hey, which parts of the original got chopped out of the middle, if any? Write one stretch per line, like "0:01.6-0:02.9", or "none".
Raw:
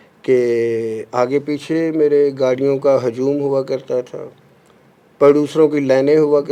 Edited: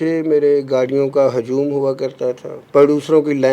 0:04.2-0:05.0